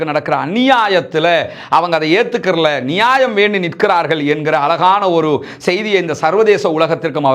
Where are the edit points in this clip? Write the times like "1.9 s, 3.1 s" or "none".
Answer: none

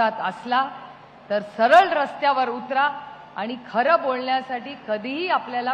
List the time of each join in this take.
none

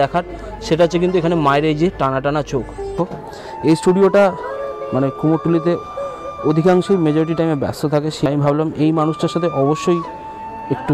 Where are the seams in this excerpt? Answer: 2.9 s, 8.3 s

